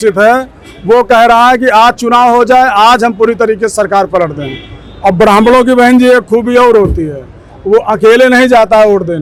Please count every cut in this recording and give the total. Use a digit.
0